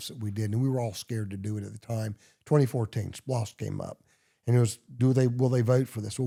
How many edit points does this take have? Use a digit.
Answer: 0